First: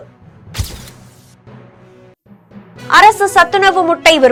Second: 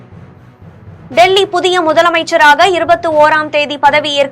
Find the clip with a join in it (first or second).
second